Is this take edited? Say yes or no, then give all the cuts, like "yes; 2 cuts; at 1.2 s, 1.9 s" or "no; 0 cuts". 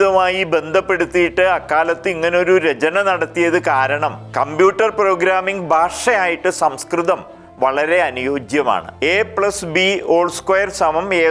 yes; 2 cuts; at 4.2 s, 8.9 s